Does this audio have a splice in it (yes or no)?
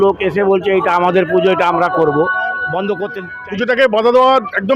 yes